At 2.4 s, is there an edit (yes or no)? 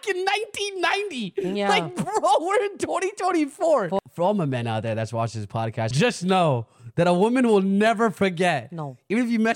no